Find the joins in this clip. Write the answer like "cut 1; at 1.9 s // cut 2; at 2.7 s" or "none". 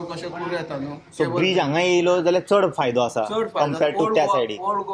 none